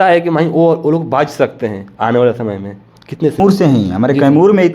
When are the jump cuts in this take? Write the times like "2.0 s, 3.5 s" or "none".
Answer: 3.4 s